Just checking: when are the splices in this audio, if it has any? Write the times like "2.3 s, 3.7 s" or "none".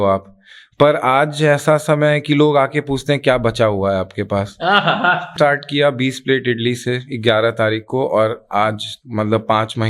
5.3 s